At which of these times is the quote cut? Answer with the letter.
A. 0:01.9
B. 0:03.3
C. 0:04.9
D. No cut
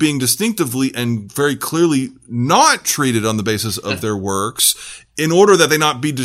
D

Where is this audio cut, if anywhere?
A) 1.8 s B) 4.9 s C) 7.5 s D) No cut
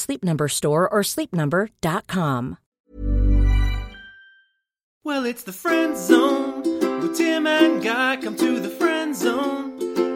B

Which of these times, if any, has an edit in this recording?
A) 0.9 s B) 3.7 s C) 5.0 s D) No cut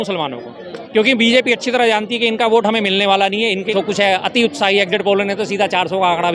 B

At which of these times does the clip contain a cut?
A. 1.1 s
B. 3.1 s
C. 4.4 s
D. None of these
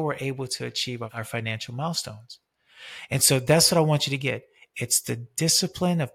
A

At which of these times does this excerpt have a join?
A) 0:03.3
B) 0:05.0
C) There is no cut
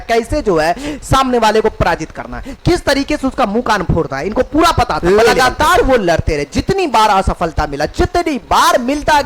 B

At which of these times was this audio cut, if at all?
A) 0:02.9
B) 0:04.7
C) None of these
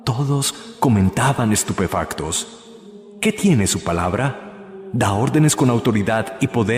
C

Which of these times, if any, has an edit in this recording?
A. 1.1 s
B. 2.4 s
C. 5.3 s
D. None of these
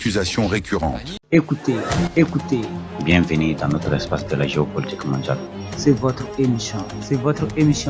A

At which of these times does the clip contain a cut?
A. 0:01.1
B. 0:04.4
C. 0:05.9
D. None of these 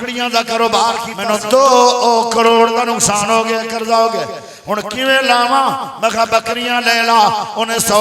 A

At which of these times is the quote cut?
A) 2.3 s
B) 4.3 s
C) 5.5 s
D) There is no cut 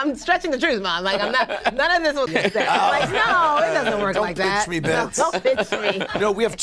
A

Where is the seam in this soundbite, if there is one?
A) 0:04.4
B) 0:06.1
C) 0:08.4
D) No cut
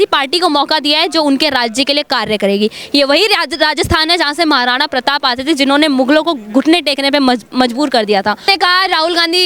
C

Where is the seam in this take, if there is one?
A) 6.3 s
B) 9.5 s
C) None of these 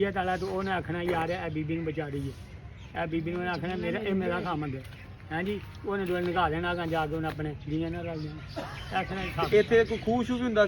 B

